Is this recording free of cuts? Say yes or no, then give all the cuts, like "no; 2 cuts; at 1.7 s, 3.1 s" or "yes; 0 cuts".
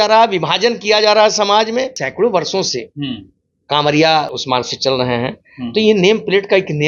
no; 2 cuts; at 2.0 s, 4.4 s